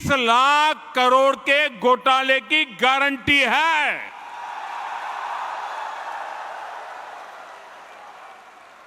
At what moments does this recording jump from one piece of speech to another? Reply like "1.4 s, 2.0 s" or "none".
none